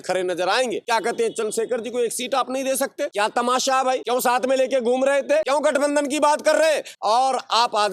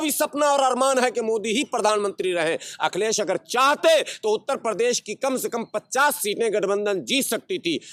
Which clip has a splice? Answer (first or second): first